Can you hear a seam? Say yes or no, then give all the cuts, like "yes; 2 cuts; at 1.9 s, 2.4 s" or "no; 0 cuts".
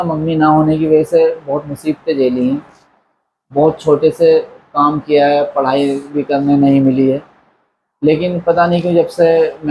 no; 0 cuts